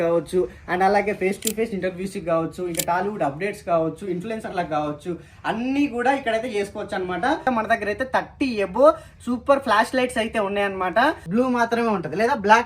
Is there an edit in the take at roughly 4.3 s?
no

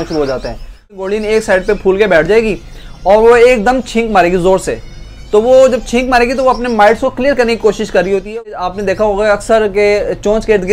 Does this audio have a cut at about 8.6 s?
yes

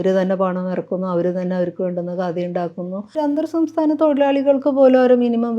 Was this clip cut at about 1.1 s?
no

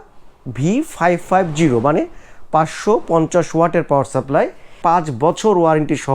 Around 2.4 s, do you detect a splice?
no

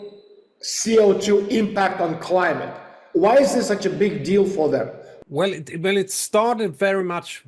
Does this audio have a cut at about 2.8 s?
no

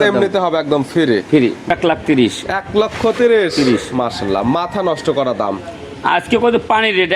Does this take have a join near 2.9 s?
no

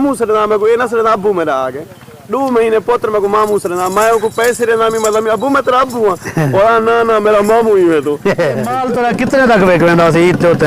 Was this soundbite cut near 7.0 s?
no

